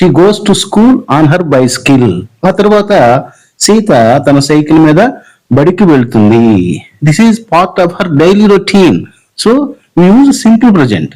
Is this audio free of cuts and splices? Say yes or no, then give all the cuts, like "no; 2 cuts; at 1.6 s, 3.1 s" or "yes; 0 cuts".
yes; 0 cuts